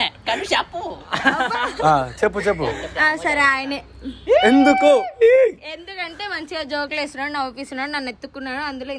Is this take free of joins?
yes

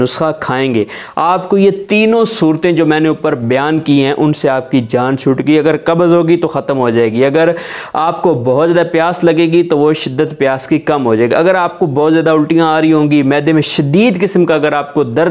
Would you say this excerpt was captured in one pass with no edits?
yes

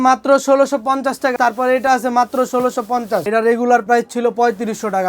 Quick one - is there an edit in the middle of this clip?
yes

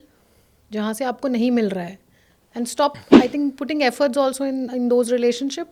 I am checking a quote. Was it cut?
no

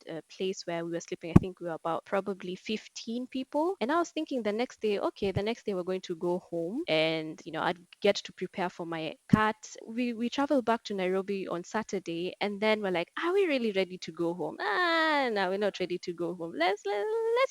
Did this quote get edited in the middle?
yes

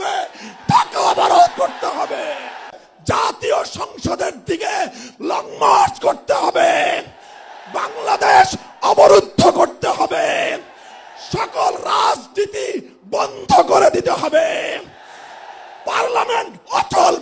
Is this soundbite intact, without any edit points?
no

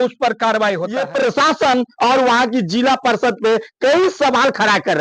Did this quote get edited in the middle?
yes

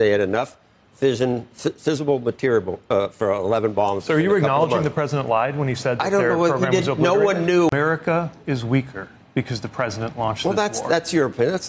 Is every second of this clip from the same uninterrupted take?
no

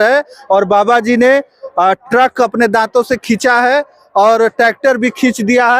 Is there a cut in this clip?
no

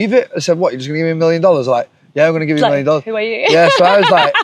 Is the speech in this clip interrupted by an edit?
no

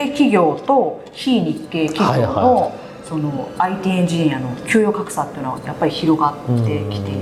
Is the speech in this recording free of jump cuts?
yes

